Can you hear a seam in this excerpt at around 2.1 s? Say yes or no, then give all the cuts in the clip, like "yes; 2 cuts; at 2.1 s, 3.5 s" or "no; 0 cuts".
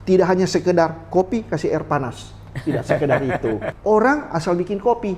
no; 1 cut; at 3.7 s